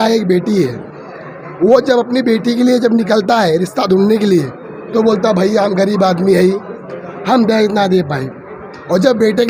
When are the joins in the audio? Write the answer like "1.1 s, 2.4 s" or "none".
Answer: none